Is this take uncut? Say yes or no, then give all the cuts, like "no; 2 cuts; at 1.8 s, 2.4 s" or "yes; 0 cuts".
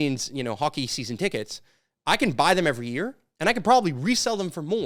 yes; 0 cuts